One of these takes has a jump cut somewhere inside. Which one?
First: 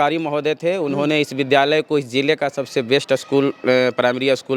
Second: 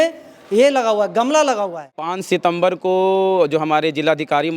second; 1 cut; at 2.2 s

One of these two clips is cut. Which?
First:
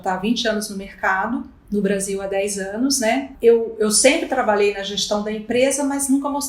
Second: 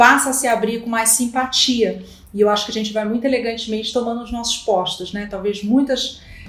first; 2 cuts; at 1.5 s, 3.3 s

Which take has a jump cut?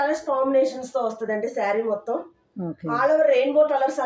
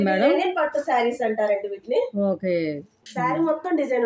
second; 1 cut; at 3.0 s

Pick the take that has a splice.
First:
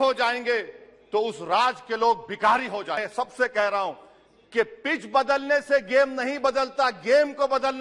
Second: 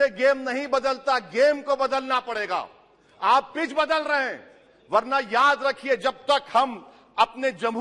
first; 1 cut; at 3.1 s

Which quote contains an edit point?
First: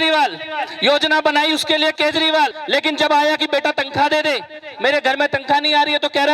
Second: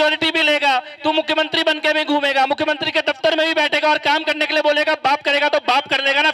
first; 1 cut; at 2.6 s

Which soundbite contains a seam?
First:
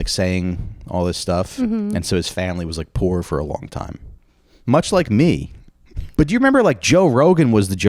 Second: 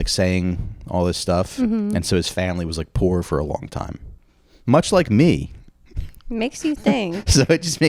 first; 1 cut; at 6.0 s

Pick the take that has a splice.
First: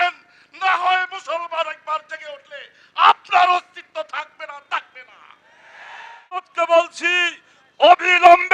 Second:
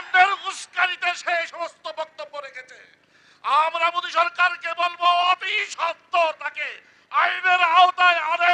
first; 1 cut; at 6.5 s

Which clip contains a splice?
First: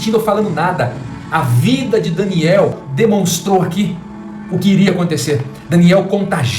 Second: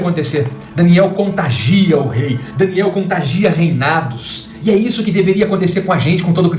first; 1 cut; at 2.8 s

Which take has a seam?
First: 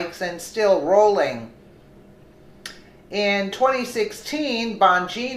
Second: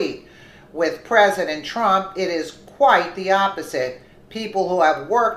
second; 1 cut; at 3.2 s

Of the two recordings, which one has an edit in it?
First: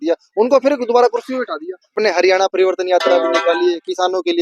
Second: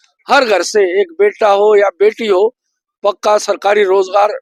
first; 1 cut; at 1.9 s

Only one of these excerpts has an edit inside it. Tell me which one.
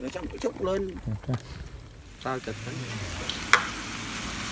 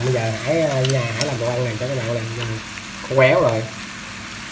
first; 1 cut; at 2.7 s

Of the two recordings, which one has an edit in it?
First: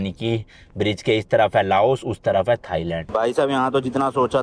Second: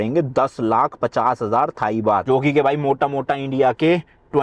first; 1 cut; at 3.0 s

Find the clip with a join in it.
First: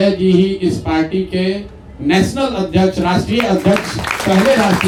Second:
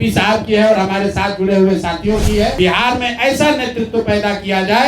second; 1 cut; at 2.6 s

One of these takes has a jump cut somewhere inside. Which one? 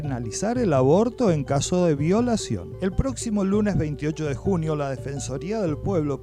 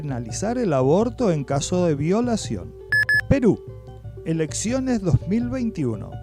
second; 1 cut; at 2.7 s

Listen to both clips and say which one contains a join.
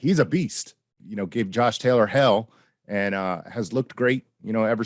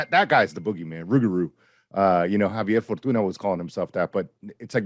first; 1 cut; at 0.9 s

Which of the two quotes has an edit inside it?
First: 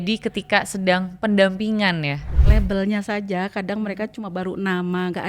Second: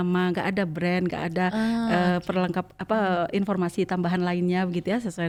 first; 1 cut; at 2.3 s

